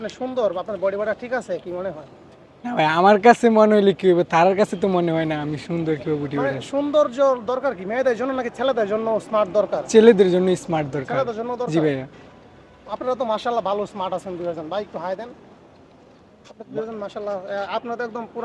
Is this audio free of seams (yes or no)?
yes